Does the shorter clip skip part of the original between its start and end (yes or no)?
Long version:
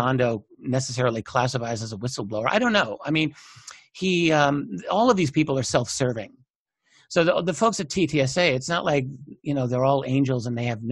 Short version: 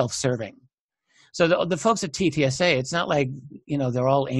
no